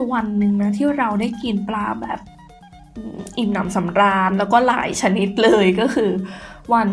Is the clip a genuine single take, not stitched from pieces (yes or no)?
yes